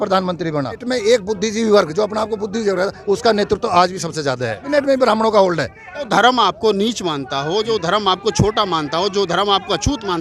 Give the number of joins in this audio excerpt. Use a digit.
3